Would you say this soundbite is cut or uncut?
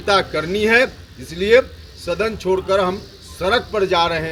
uncut